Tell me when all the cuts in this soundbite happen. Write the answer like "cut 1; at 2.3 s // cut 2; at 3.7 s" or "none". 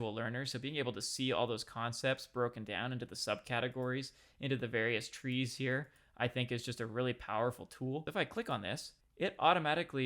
cut 1; at 8.1 s